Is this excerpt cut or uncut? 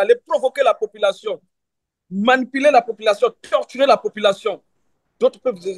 uncut